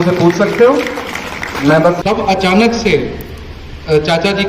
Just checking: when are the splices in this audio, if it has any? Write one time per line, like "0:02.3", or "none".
0:02.0